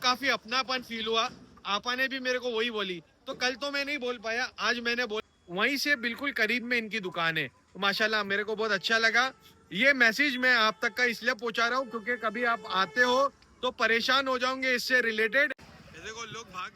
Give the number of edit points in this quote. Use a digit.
2